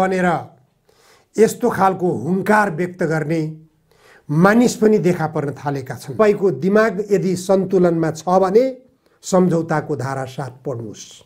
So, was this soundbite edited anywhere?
yes; 1 cut; at 6.1 s

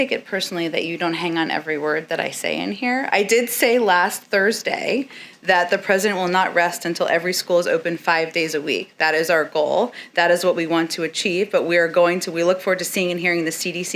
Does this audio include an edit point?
no; 0 cuts

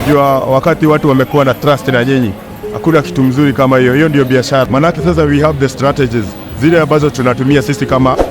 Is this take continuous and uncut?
no; 1 cut; at 4.7 s

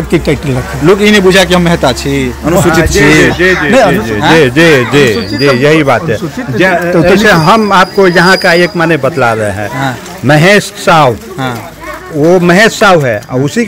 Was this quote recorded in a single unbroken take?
yes; 0 cuts

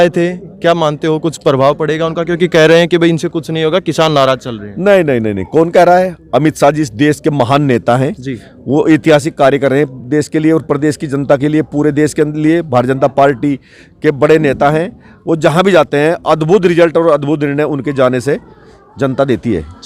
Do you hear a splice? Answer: no; 0 cuts

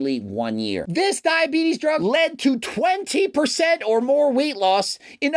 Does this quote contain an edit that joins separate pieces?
yes; 2 cuts; at 0.9 s, 2.0 s

